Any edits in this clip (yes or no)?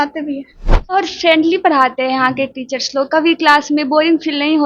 yes